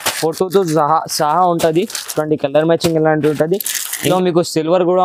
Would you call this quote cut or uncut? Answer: cut